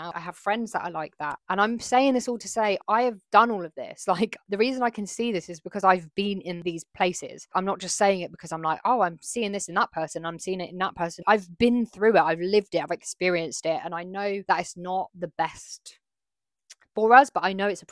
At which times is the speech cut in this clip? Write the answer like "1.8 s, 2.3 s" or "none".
11.2 s